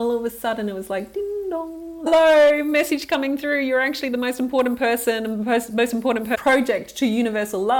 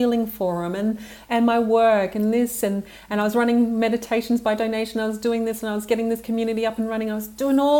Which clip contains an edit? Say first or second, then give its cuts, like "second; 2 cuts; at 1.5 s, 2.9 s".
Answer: first; 2 cuts; at 2.1 s, 6.3 s